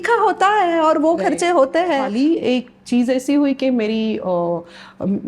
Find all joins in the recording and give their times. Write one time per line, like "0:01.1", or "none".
0:02.1